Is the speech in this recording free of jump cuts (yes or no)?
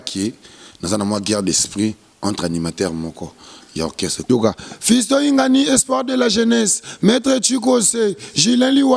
no